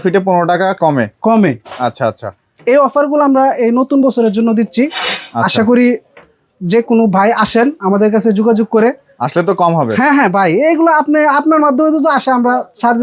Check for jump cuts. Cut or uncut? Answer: uncut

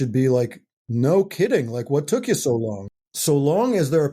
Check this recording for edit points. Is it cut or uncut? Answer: cut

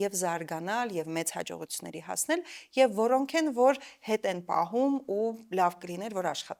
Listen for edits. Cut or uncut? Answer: uncut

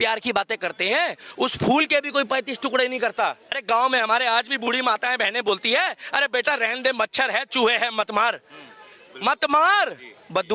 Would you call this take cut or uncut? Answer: cut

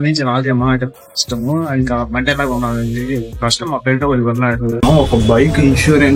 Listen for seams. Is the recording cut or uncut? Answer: cut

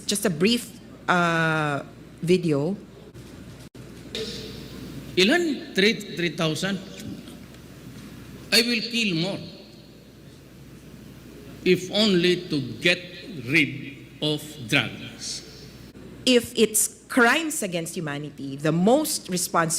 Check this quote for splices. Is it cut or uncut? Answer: cut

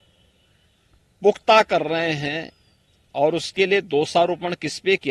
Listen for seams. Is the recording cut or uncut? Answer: uncut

